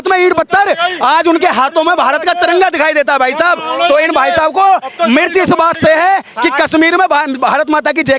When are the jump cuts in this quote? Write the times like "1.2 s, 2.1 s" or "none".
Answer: none